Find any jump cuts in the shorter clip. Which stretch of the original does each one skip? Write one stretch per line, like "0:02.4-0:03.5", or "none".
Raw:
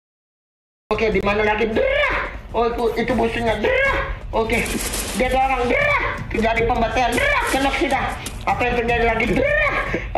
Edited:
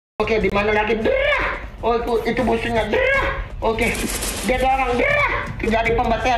none